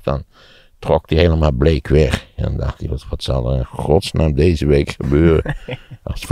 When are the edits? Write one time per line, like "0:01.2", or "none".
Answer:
none